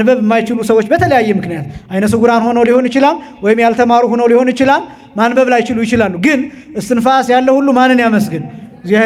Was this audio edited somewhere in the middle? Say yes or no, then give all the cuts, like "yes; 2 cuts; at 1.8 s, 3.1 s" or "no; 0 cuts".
no; 0 cuts